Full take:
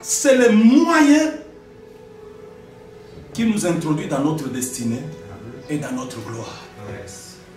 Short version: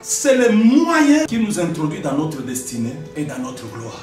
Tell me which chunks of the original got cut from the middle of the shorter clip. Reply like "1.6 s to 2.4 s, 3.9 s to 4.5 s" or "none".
1.3 s to 3.3 s, 5.1 s to 5.6 s